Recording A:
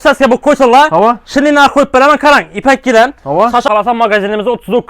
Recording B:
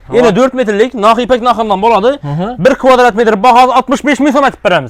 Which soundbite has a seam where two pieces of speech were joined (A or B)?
A